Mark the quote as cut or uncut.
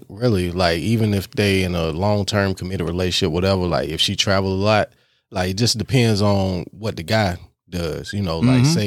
uncut